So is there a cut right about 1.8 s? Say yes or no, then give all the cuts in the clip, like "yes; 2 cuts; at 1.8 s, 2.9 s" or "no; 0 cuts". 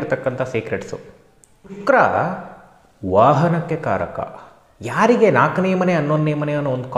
yes; 1 cut; at 1.8 s